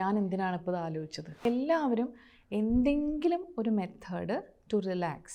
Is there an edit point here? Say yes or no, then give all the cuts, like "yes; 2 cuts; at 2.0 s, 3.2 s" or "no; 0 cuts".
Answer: yes; 1 cut; at 1.4 s